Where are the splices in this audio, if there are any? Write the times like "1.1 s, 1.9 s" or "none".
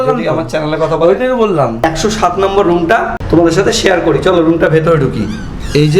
1.8 s, 3.2 s